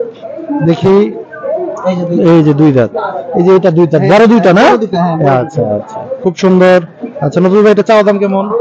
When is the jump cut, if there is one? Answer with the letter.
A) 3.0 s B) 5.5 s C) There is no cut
C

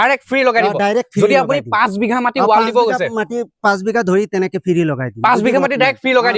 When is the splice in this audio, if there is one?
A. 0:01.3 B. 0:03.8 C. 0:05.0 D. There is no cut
D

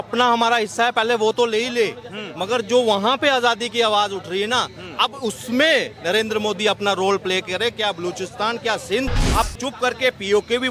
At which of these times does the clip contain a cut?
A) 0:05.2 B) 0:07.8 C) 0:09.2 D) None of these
C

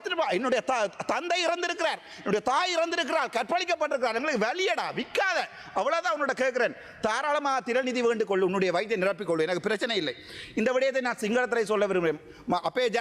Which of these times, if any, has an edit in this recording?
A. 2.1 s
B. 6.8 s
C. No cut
C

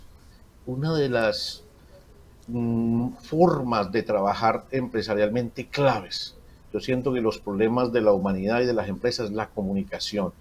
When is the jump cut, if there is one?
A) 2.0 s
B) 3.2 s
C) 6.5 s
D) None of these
D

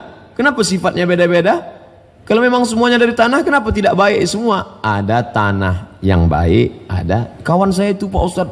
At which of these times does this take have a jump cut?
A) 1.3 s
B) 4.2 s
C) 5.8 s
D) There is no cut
D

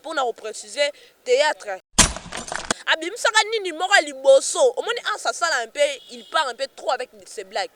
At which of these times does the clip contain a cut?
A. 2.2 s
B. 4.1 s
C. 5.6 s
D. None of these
A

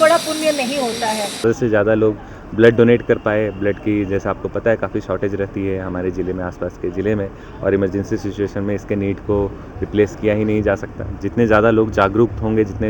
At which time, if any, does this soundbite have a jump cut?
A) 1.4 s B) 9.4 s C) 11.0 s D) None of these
A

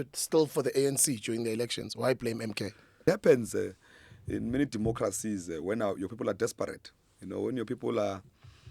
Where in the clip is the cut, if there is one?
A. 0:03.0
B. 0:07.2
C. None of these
A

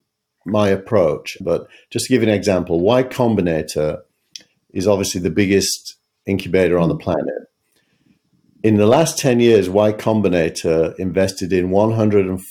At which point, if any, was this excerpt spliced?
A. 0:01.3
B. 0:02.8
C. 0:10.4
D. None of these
A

